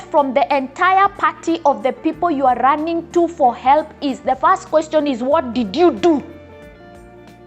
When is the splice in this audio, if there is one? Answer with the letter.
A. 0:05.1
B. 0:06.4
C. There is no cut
B